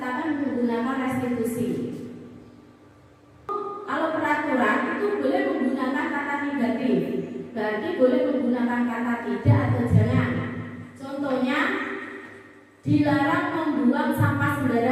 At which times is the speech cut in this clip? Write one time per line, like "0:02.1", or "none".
0:03.5